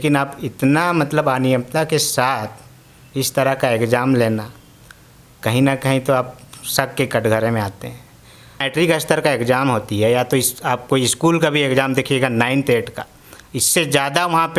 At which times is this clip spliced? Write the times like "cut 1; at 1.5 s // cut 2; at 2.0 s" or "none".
cut 1; at 8.7 s